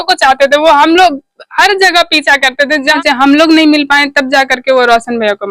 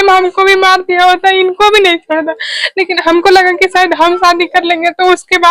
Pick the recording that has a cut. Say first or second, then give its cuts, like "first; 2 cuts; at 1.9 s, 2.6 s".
first; 1 cut; at 3.0 s